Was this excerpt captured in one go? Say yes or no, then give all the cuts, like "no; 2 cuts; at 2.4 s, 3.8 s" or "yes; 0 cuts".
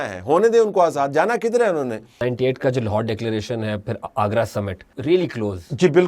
no; 2 cuts; at 2.1 s, 4.8 s